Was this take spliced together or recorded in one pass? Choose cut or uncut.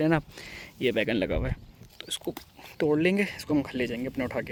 uncut